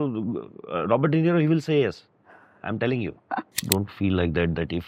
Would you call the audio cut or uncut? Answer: cut